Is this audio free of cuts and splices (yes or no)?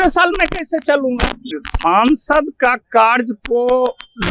no